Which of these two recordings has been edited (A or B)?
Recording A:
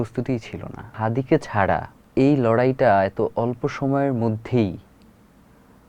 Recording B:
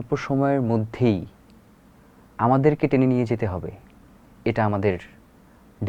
A